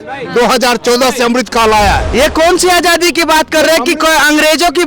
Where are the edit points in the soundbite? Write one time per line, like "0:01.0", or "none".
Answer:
0:02.1